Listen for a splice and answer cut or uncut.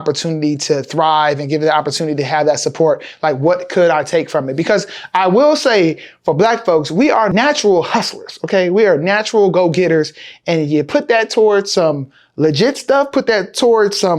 cut